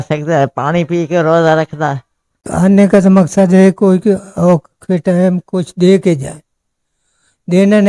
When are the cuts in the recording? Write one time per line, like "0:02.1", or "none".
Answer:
0:02.5

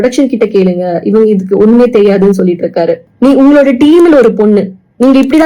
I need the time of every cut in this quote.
0:03.0

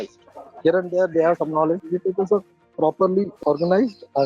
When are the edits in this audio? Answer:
0:01.8
0:03.3

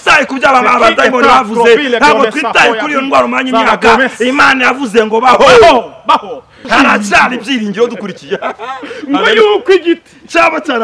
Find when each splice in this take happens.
0:06.7

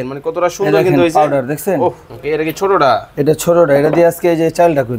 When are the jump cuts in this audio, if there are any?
0:02.1

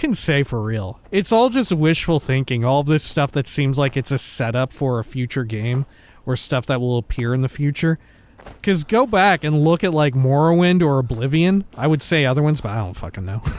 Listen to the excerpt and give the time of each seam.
0:00.9
0:11.7

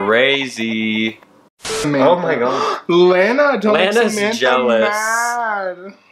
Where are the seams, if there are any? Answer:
0:01.6

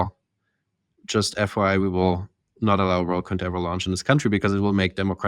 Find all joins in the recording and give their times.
none

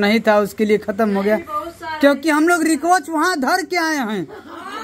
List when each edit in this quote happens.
none

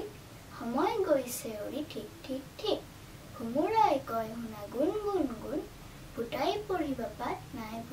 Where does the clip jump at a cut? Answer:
none

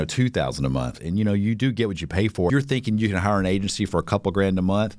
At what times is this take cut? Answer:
0:02.5

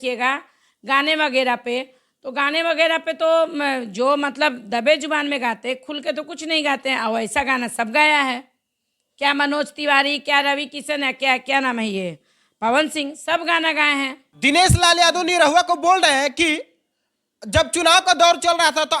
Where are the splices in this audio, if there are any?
0:14.2

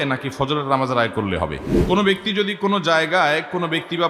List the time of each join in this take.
0:01.7

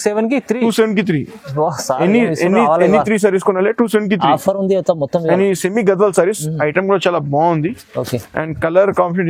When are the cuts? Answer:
none

